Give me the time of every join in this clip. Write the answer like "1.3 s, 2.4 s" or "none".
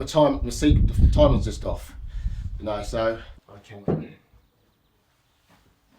3.3 s